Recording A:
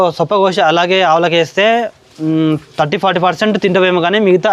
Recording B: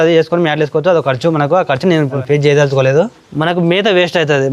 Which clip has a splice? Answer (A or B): B